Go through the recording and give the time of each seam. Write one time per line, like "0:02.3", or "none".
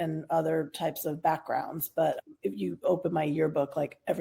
0:02.2